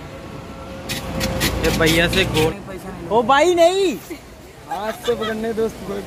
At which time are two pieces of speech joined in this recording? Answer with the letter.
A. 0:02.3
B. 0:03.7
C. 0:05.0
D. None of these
A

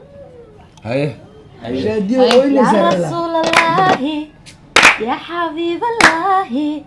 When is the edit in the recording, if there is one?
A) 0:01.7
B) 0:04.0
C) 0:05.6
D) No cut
A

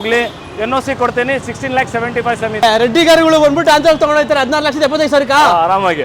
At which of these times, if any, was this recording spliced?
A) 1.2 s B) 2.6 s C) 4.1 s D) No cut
D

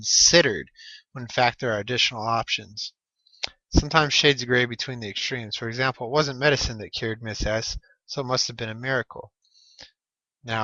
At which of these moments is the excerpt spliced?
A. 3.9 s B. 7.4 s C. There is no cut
C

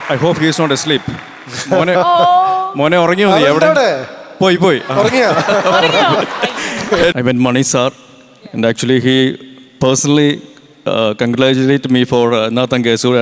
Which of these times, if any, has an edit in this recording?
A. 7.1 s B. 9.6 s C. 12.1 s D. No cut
A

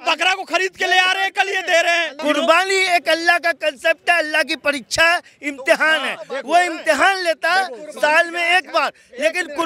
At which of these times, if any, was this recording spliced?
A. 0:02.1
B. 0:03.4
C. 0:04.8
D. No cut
A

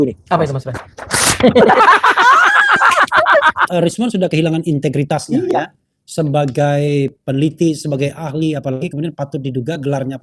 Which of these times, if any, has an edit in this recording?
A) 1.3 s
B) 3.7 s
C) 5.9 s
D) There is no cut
B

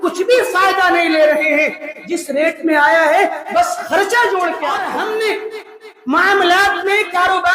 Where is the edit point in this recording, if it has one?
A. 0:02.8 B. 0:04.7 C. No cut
B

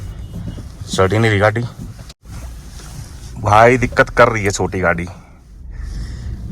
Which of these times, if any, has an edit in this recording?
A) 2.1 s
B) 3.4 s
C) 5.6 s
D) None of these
A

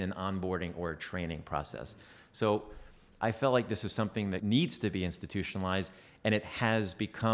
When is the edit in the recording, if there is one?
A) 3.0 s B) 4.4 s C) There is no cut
B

